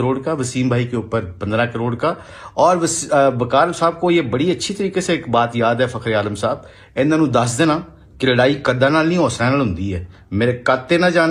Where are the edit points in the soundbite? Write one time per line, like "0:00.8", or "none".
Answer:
none

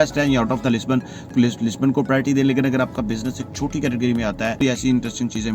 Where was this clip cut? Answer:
0:01.3
0:04.6

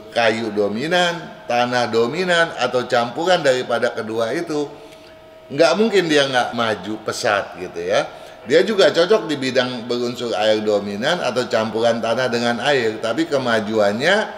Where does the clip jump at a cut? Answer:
0:06.5

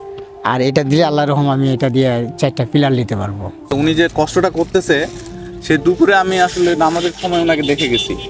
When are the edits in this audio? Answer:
0:03.7

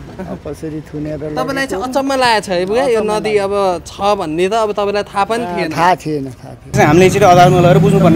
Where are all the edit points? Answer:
0:06.7

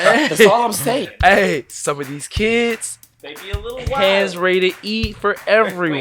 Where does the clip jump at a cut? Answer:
none

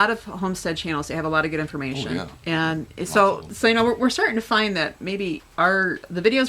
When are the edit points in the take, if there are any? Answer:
0:03.5
0:05.7

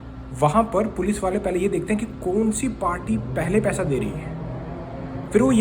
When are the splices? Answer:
none

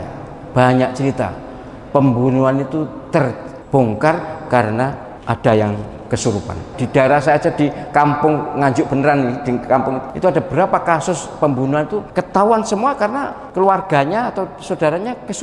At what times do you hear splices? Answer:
0:03.5
0:05.1
0:06.7
0:10.1
0:12.1
0:13.4

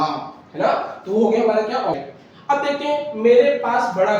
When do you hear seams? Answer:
0:02.0

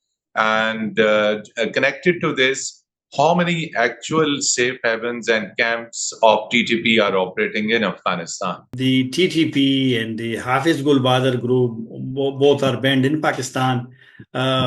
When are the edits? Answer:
0:08.7

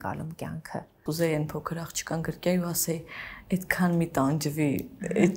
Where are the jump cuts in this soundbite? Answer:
0:01.0

